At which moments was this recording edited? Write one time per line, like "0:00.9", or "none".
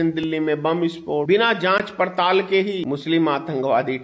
0:01.3
0:02.8